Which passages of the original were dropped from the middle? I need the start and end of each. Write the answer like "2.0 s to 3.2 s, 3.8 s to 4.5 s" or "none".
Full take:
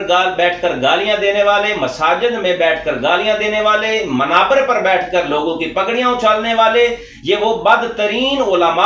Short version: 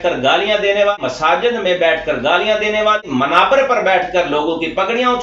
1.5 s to 1.7 s, 3.8 s to 4.0 s